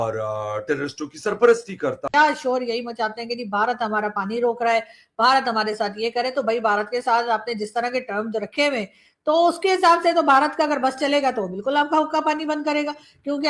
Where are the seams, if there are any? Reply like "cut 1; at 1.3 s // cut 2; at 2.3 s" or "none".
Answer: cut 1; at 2.0 s